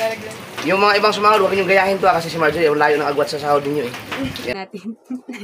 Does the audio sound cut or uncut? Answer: cut